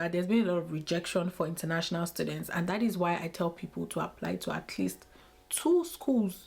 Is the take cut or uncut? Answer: uncut